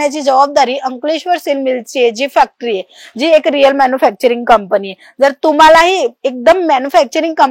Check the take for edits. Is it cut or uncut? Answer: uncut